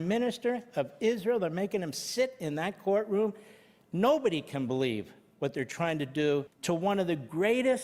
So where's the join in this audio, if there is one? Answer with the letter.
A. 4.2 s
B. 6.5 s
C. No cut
B